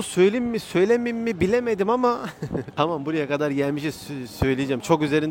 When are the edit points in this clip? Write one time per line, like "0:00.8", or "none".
none